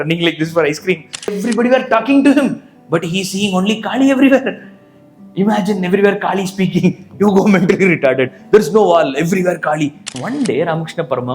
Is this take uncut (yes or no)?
no